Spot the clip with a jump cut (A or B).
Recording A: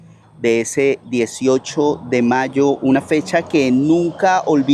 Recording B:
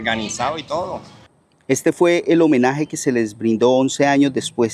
B